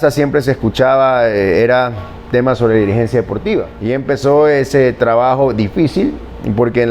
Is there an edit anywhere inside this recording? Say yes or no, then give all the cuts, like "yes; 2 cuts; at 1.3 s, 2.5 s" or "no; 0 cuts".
yes; 1 cut; at 3.7 s